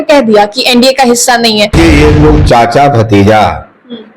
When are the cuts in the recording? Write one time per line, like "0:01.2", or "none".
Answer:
0:01.7